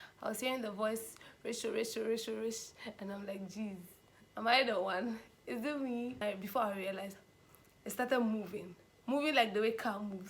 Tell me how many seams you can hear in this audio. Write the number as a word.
one